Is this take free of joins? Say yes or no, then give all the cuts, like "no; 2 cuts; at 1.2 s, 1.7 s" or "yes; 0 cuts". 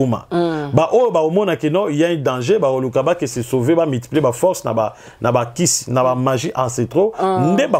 yes; 0 cuts